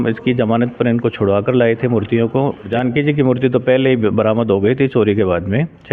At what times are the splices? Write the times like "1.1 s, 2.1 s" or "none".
2.7 s